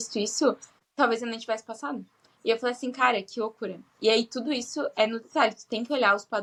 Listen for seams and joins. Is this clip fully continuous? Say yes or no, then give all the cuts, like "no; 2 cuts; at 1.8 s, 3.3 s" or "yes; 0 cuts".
yes; 0 cuts